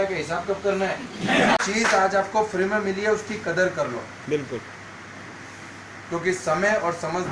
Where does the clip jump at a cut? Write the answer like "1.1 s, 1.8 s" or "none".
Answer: 1.6 s